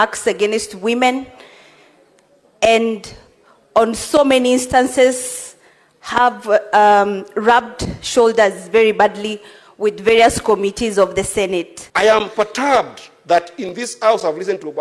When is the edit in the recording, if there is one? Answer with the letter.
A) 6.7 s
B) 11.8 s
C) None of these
B